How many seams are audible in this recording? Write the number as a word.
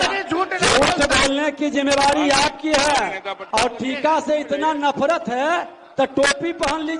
one